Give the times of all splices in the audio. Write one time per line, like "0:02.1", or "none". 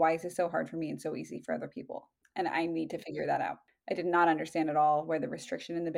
0:03.7